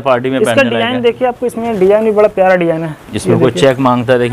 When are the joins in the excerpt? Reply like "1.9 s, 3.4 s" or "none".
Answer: none